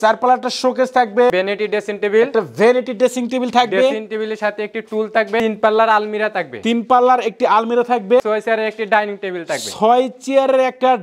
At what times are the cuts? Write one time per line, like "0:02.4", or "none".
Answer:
0:01.3
0:05.4
0:08.2